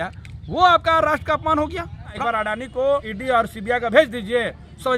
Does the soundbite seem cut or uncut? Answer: cut